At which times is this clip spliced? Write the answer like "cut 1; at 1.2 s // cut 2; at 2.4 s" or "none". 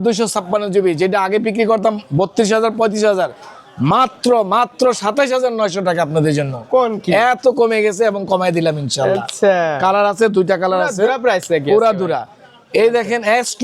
none